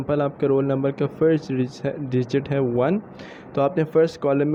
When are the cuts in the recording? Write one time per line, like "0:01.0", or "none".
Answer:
none